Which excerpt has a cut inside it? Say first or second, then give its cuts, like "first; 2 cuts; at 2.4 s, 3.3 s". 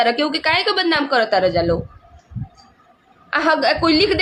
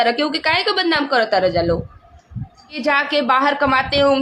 second; 1 cut; at 2.7 s